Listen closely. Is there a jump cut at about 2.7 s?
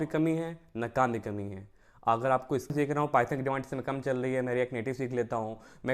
yes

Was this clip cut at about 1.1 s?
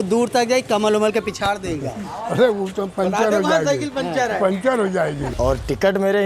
no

